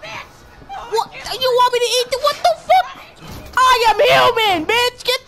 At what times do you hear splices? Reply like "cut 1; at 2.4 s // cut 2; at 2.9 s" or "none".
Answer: none